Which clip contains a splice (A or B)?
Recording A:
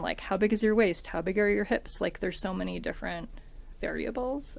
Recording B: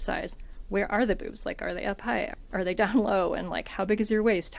B